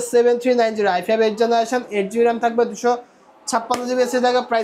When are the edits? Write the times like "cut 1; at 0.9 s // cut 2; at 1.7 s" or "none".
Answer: none